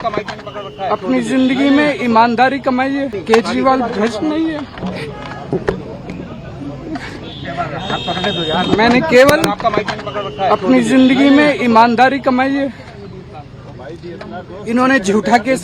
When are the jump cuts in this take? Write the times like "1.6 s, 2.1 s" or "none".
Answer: 3.3 s